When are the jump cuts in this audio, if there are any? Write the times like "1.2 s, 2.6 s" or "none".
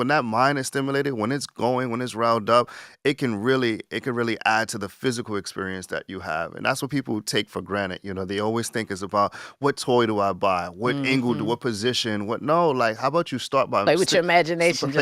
none

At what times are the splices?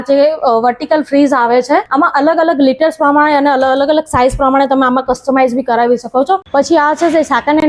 1.9 s, 6.5 s

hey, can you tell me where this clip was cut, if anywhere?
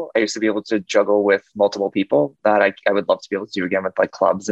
none

